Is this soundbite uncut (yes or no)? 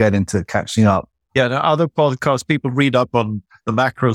no